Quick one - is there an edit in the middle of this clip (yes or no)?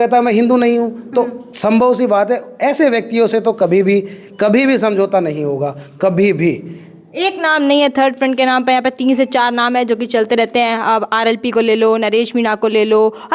no